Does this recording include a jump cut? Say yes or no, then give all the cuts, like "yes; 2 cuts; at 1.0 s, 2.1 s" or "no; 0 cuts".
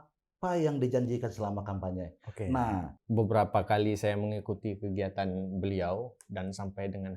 yes; 1 cut; at 3.0 s